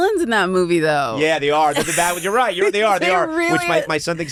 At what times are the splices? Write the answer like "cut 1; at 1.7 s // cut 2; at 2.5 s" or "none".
none